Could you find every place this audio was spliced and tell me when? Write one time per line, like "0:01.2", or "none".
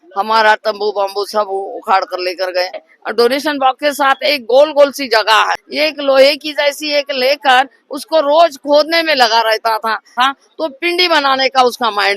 0:02.9
0:05.6
0:10.1